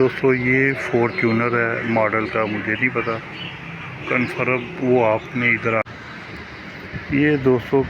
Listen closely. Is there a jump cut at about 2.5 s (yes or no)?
no